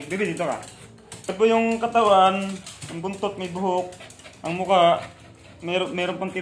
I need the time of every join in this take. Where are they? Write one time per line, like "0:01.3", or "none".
0:01.3

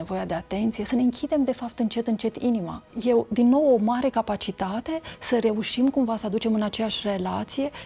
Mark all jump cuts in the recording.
0:03.0

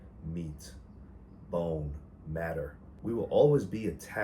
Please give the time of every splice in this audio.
0:02.8

